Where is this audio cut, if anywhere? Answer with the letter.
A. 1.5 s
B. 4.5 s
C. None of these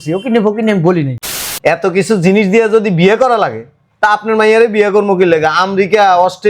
A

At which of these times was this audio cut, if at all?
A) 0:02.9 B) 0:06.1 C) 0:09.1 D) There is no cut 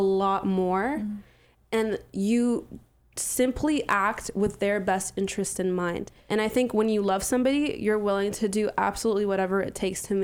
B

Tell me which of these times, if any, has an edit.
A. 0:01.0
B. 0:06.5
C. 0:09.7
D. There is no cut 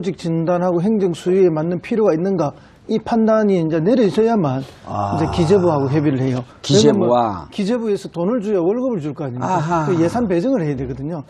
A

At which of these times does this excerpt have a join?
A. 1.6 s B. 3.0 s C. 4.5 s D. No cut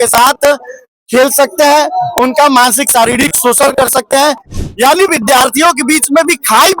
C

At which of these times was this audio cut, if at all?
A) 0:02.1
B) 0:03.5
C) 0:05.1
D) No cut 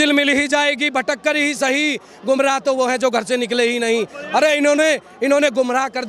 D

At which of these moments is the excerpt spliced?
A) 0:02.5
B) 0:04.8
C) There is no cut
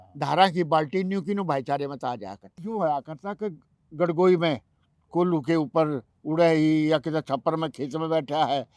A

